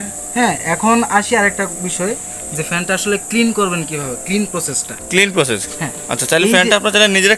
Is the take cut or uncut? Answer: uncut